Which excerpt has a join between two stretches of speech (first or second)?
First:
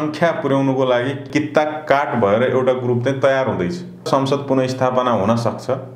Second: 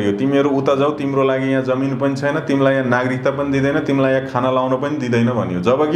first